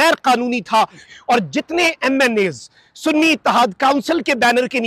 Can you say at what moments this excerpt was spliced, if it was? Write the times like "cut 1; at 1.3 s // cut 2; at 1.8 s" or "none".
cut 1; at 1.0 s